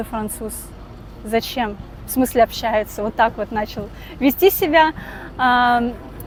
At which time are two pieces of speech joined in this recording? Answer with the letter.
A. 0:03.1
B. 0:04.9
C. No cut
C